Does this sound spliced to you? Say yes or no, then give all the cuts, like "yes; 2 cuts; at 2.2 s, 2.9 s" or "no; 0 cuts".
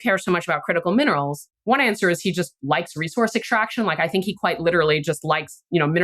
yes; 1 cut; at 1.5 s